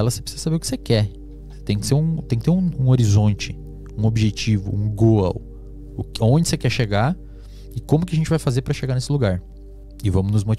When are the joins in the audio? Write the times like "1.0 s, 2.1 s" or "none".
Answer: none